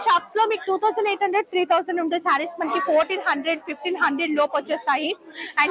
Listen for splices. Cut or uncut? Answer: uncut